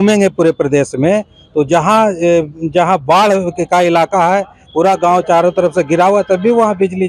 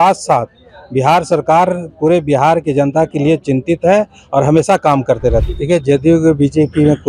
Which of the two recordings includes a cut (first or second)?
second